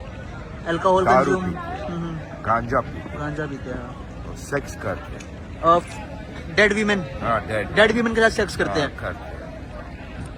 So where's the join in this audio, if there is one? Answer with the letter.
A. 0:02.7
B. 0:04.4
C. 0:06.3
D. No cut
D